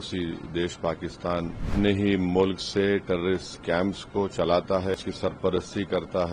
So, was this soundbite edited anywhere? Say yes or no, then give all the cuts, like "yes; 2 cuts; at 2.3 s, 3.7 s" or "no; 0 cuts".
yes; 2 cuts; at 1.7 s, 5.0 s